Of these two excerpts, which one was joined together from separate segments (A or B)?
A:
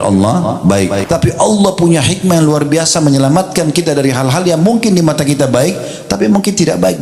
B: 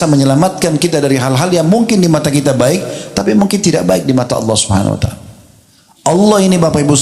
A